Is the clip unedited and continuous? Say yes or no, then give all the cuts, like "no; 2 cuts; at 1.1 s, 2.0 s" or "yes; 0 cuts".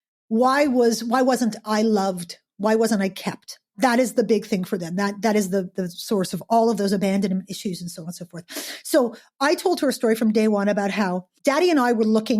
no; 2 cuts; at 3.7 s, 11.3 s